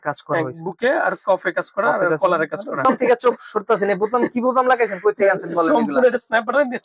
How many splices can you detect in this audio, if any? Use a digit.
1